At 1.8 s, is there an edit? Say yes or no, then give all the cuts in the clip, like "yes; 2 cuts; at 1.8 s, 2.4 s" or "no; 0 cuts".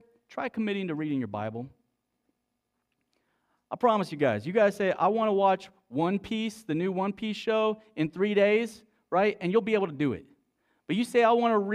no; 0 cuts